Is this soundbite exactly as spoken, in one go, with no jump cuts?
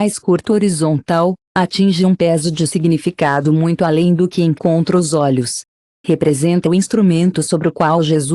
yes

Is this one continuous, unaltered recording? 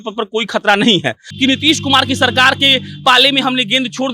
no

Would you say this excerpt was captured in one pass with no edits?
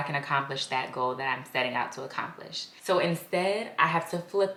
yes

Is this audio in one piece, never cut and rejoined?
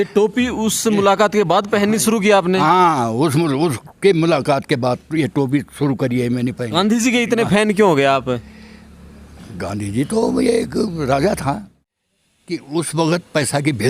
no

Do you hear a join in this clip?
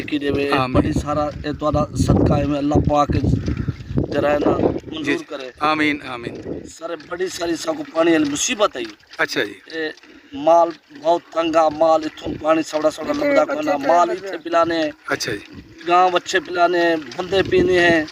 no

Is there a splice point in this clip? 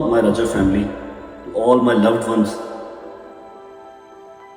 no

